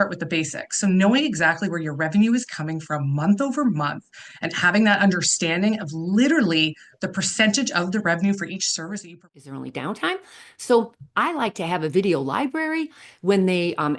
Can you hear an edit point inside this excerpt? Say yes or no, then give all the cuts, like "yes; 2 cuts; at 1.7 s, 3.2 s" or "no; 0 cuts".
yes; 1 cut; at 9.2 s